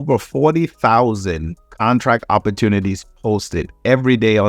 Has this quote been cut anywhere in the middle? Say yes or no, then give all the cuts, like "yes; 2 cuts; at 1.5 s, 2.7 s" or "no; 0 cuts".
no; 0 cuts